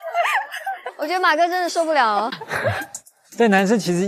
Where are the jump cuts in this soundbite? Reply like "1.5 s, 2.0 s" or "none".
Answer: 2.4 s